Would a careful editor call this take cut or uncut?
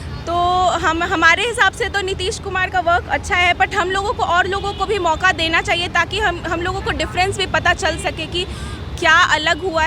uncut